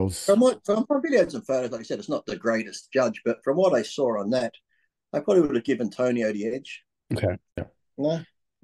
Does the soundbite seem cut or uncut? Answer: cut